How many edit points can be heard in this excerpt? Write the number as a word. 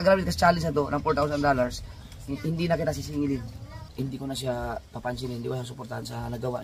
one